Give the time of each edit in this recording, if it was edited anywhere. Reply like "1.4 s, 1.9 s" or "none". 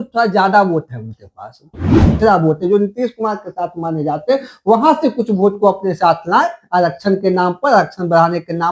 2.1 s